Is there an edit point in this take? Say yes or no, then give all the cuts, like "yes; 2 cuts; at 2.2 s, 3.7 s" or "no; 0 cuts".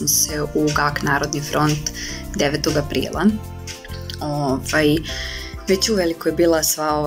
no; 0 cuts